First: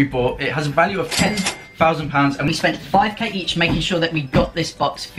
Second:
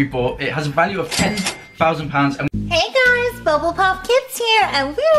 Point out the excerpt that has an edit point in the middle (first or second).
second